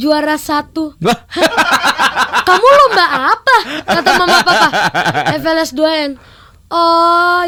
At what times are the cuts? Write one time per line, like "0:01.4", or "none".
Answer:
none